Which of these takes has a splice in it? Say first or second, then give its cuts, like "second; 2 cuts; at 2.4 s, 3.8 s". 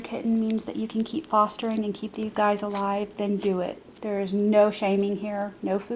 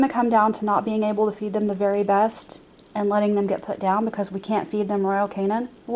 first; 1 cut; at 3.9 s